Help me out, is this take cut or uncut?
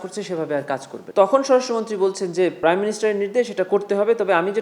cut